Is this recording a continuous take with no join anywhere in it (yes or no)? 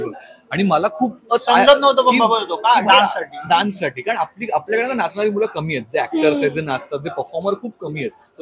yes